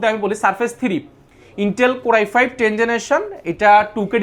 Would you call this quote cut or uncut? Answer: uncut